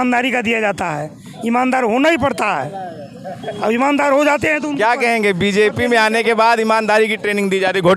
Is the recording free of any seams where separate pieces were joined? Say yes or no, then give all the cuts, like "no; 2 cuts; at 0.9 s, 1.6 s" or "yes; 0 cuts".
yes; 0 cuts